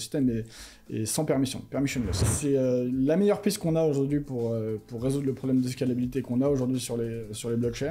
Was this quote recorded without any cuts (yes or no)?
no